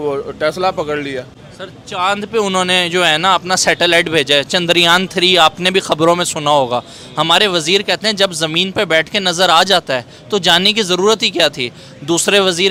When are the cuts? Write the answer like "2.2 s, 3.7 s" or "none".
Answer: none